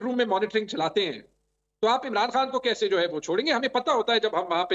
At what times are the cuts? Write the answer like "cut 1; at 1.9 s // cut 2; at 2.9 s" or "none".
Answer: none